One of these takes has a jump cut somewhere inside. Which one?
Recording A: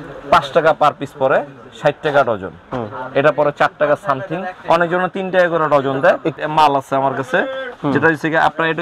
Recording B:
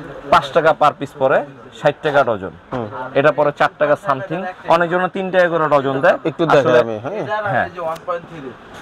A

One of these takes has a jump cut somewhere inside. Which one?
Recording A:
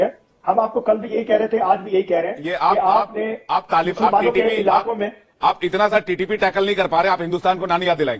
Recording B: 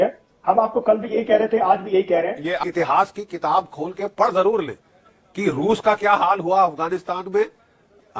B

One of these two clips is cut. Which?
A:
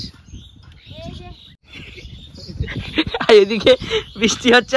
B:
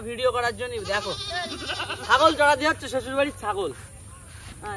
A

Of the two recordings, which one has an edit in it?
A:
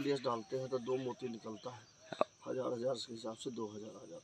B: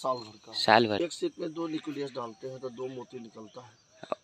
B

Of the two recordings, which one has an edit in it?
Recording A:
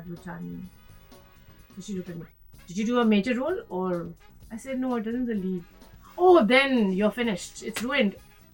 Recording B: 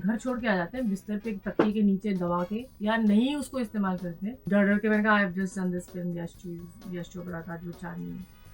B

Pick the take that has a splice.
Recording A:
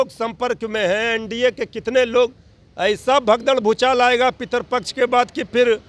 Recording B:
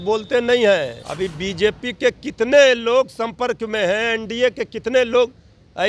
B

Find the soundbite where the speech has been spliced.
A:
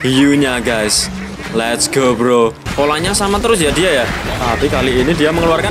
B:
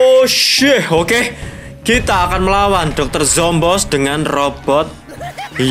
A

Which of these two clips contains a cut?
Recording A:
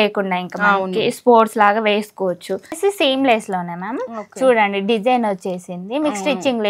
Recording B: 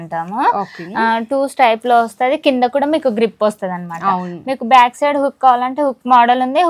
A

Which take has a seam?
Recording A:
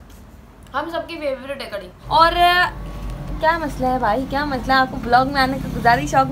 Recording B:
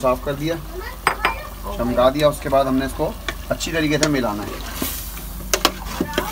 A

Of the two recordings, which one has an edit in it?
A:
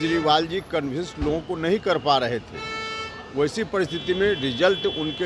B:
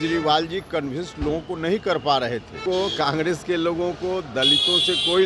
B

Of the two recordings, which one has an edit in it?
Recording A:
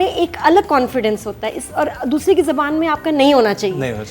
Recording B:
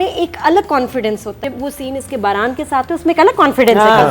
B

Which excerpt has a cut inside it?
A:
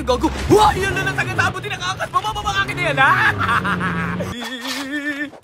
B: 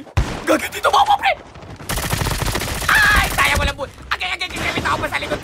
A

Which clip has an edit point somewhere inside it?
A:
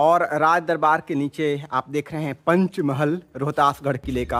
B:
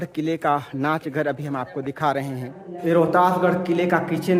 B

